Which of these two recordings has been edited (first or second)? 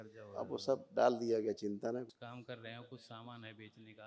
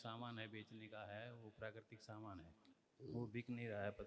first